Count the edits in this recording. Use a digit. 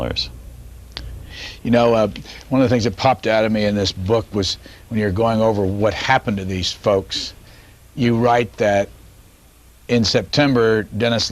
1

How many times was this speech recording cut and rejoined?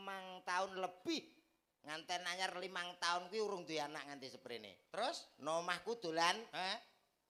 0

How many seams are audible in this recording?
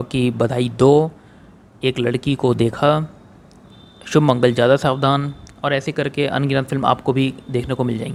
0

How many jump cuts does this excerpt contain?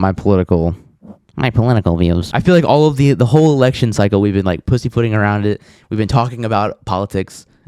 1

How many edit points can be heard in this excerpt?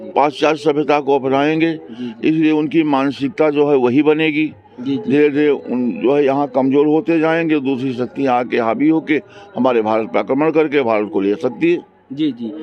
0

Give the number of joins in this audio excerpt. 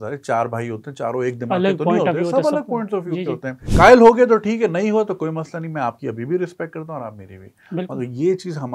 1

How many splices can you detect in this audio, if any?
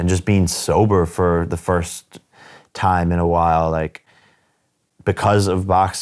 0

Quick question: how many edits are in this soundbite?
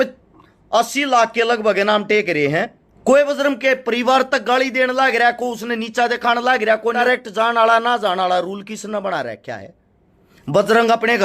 2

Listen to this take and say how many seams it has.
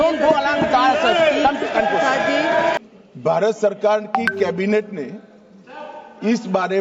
1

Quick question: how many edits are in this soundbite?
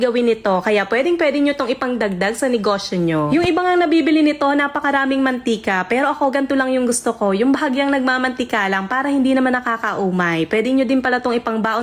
0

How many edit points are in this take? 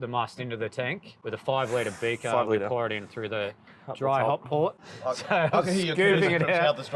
2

